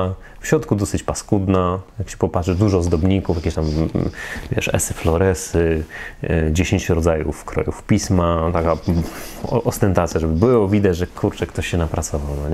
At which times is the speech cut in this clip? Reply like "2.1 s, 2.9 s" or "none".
none